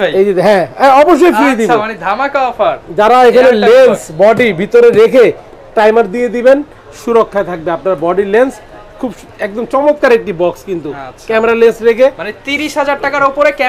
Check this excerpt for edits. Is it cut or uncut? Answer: uncut